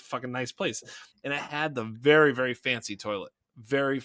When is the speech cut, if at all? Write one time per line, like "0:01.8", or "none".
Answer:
0:01.1